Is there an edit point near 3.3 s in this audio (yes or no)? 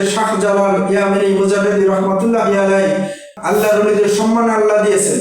yes